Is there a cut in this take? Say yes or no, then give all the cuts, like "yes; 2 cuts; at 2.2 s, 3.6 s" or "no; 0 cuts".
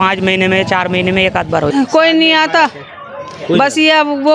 yes; 1 cut; at 1.7 s